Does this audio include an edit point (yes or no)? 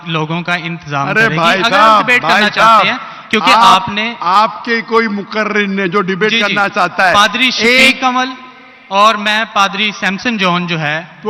no